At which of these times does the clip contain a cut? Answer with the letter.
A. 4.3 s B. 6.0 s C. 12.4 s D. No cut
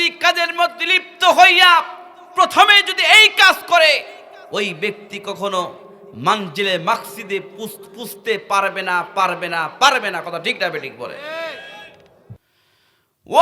C